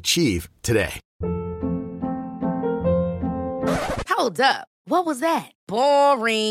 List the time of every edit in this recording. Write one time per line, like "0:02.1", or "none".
0:01.0